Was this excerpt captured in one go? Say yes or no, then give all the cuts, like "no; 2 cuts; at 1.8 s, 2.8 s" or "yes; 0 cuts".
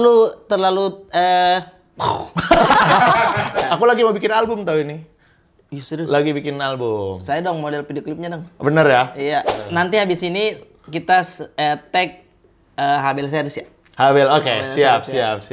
no; 2 cuts; at 3.6 s, 9.5 s